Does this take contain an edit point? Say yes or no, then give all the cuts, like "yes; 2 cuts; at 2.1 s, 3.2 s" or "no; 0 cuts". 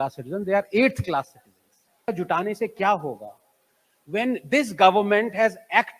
yes; 1 cut; at 2.1 s